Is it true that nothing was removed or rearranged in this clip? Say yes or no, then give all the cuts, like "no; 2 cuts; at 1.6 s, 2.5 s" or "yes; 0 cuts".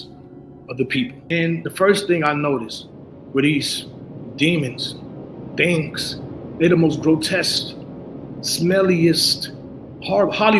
no; 1 cut; at 1.2 s